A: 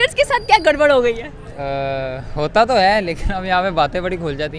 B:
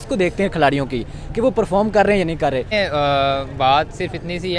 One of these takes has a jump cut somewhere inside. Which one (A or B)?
B